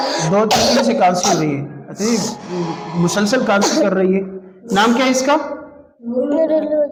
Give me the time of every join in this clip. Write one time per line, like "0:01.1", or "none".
none